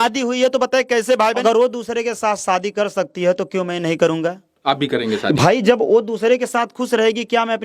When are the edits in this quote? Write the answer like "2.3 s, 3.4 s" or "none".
1.4 s, 4.5 s